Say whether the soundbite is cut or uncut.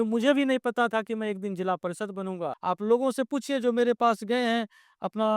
cut